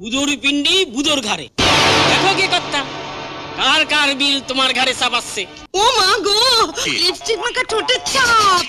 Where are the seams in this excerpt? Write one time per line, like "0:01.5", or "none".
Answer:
0:05.6